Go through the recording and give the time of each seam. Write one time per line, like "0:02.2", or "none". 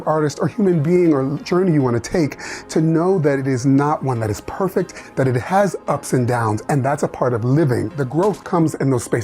0:08.0

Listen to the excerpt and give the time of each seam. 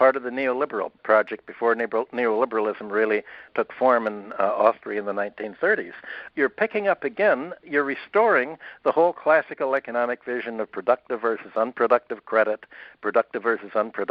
0:01.0
0:03.5
0:06.2
0:07.6

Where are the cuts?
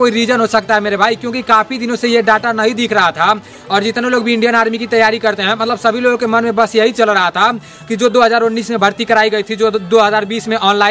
none

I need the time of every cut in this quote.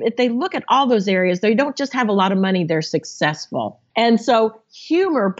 0:03.8

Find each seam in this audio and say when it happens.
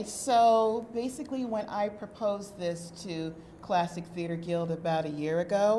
none

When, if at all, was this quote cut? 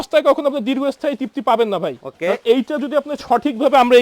none

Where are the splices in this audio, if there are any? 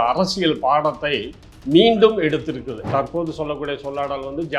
0:02.8

